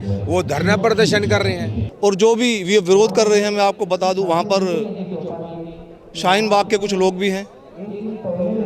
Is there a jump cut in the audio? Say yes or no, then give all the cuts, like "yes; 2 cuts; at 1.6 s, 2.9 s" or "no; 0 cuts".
yes; 1 cut; at 1.8 s